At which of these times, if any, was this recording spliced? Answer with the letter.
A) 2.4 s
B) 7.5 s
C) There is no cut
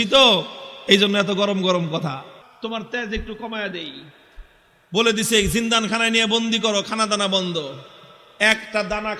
A